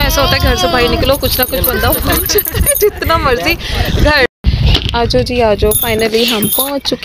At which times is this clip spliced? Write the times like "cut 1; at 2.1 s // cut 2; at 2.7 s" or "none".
cut 1; at 4.3 s